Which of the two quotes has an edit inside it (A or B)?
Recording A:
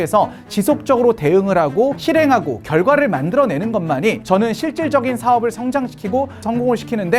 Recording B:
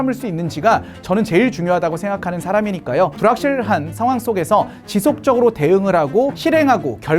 B